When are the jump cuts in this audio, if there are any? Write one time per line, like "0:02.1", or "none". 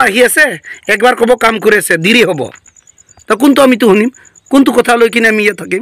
none

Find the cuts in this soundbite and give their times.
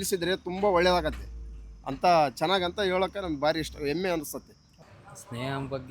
0:04.7

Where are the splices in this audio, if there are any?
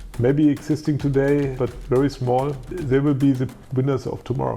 0:01.5
0:02.7

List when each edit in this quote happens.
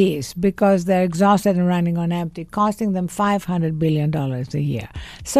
none

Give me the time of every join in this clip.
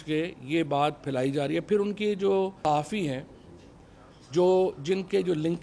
0:02.7

